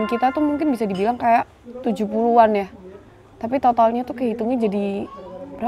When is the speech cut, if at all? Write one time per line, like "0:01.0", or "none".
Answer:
none